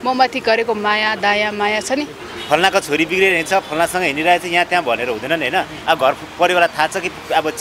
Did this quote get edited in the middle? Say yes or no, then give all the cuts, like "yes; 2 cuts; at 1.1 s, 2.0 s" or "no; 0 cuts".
yes; 1 cut; at 2.3 s